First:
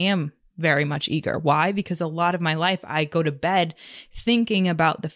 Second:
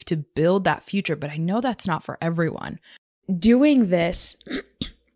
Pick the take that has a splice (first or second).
second